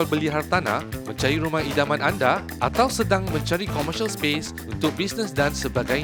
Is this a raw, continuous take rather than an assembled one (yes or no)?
yes